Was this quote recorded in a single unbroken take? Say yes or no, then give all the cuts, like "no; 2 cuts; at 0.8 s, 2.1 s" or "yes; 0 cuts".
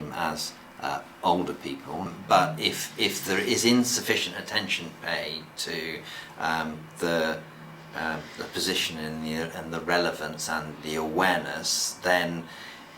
no; 1 cut; at 2.1 s